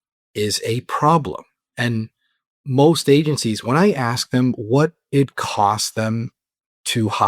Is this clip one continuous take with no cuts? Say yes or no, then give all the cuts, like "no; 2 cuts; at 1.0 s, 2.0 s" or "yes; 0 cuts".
no; 1 cut; at 2.6 s